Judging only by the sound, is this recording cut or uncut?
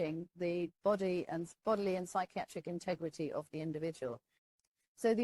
cut